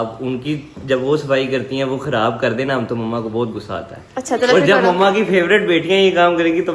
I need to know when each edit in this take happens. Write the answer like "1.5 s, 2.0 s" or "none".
none